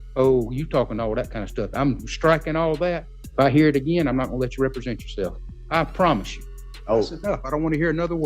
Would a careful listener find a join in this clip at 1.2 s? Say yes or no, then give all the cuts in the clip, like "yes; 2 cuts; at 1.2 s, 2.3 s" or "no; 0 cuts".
no; 3 cuts; at 3.2 s, 5.5 s, 6.5 s